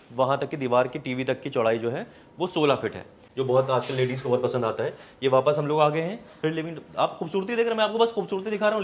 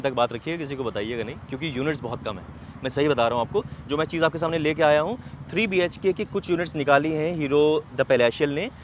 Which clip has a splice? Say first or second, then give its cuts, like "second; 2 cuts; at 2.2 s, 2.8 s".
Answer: first; 1 cut; at 3.2 s